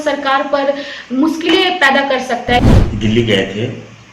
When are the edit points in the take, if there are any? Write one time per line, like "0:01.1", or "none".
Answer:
0:02.6